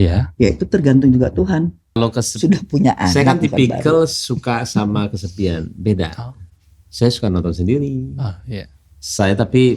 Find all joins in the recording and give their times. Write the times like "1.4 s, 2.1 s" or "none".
2.0 s